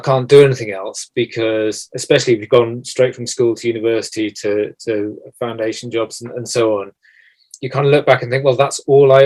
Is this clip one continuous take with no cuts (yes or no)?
yes